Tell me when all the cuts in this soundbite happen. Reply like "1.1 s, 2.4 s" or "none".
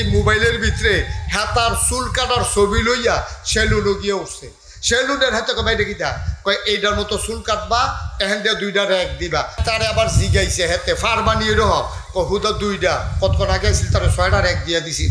9.6 s